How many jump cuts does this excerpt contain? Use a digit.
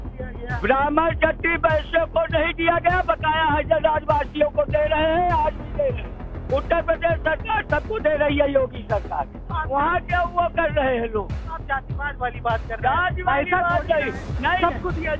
0